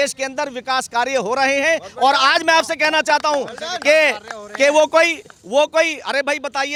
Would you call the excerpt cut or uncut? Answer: uncut